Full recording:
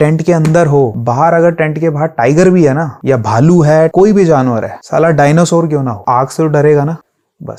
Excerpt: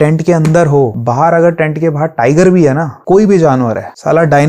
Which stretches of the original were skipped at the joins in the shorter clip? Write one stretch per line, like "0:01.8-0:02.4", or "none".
0:03.0-0:03.9